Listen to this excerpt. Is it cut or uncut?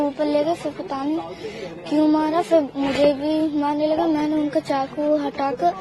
uncut